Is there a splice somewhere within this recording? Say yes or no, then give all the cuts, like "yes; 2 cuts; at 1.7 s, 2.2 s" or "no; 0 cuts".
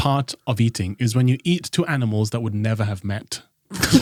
no; 0 cuts